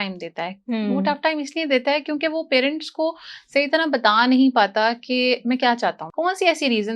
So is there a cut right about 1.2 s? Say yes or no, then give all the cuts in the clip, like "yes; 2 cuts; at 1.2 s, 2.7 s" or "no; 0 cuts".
no; 1 cut; at 6.0 s